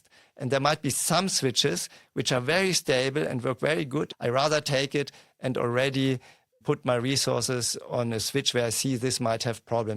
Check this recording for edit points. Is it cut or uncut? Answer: cut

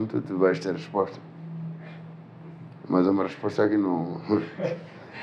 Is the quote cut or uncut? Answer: uncut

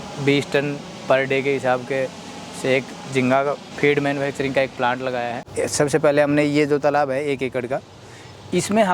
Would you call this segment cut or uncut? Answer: cut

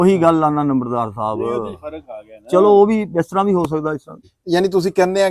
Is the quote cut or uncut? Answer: cut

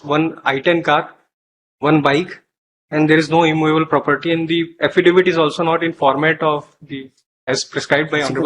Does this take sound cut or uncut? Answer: uncut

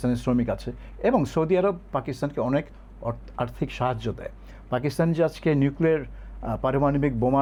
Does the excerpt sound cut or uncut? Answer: uncut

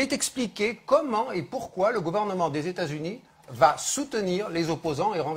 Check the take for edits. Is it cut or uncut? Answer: cut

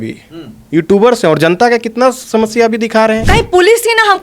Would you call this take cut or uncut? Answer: cut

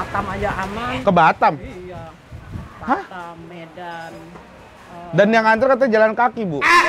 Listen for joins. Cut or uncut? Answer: uncut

